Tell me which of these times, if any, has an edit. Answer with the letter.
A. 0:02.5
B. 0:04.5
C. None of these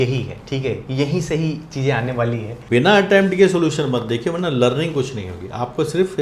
A